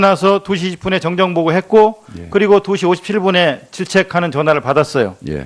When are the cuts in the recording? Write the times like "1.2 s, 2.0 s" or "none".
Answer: none